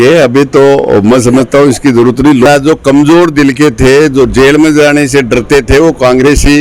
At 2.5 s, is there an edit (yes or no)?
yes